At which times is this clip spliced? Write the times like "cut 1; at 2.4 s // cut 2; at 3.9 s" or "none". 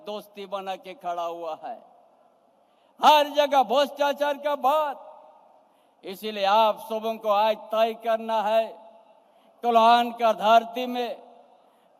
none